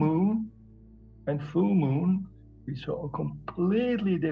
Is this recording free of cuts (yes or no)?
yes